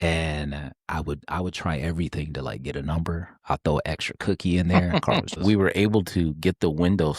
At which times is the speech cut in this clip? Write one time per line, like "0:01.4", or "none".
0:05.3